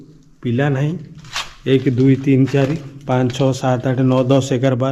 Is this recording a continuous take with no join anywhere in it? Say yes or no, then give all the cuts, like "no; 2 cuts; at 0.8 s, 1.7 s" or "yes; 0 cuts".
yes; 0 cuts